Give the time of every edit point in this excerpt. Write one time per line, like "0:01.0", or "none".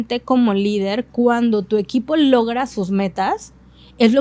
none